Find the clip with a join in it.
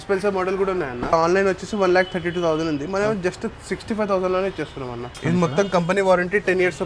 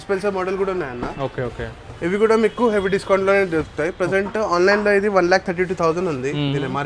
first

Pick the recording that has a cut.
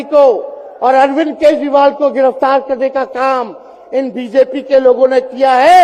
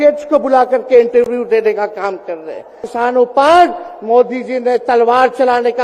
second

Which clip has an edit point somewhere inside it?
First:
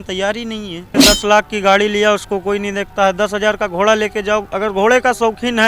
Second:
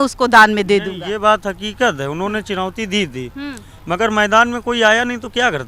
first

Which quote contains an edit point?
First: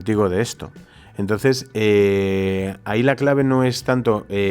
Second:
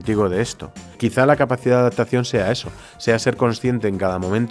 second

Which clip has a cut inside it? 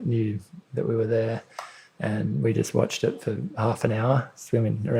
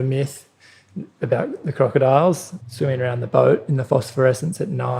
second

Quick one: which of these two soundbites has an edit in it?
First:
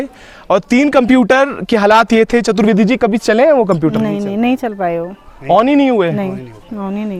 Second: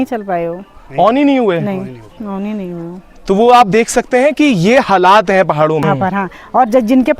second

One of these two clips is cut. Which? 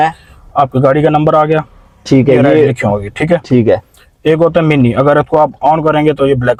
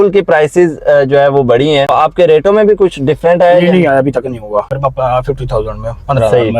second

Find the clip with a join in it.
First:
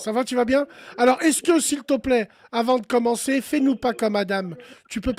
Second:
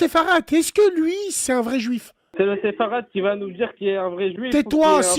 second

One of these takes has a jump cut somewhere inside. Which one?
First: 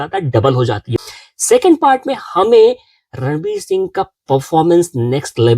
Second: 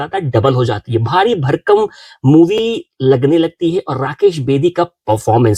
first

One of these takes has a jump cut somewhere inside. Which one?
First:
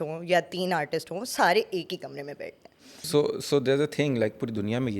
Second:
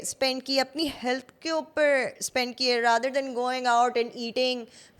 first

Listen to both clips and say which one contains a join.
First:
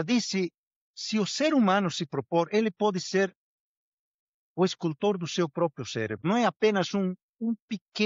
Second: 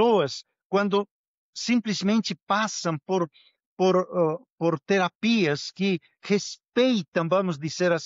first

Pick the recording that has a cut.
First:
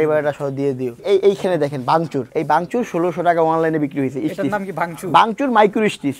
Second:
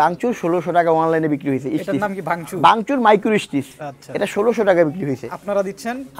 first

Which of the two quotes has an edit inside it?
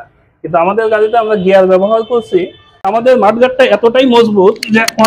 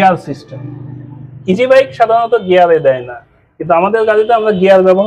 first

